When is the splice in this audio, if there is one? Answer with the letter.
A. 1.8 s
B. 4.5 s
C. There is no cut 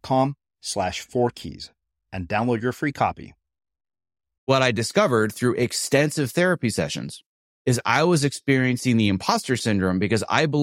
B